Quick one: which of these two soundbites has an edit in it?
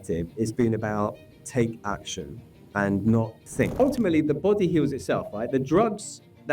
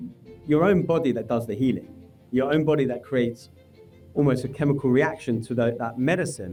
first; 1 cut; at 3.8 s

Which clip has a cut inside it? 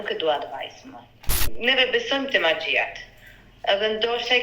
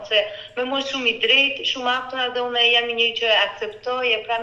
first; 1 cut; at 1.2 s

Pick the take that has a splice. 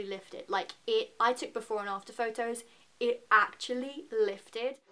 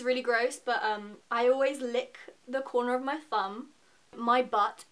second; 2 cuts; at 1.2 s, 4.2 s

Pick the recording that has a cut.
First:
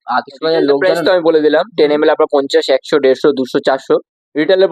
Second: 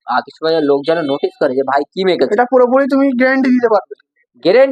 first; 1 cut; at 0.9 s

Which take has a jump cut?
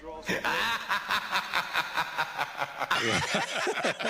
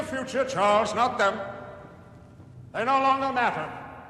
first; 1 cut; at 2.9 s

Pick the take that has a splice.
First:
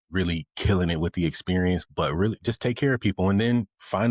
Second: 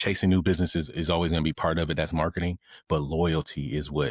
first; 1 cut; at 1.9 s

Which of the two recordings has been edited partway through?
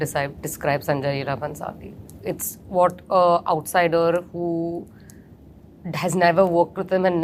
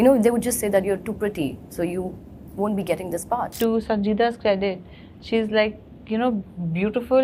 second; 1 cut; at 3.5 s

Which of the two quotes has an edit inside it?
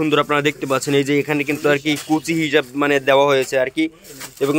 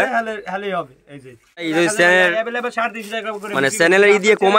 second; 1 cut; at 1.7 s

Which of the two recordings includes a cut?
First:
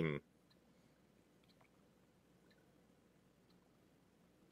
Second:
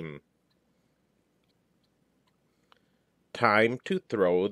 second; 1 cut; at 1.5 s

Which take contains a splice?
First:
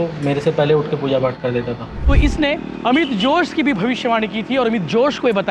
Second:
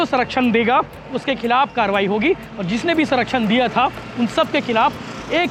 first; 1 cut; at 1.9 s

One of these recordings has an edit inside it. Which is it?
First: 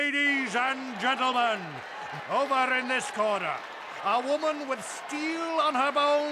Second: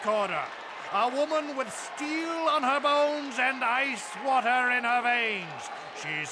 first; 1 cut; at 2.2 s

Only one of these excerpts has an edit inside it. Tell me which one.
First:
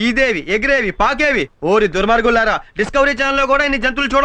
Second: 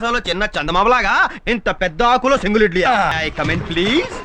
second; 1 cut; at 3.2 s

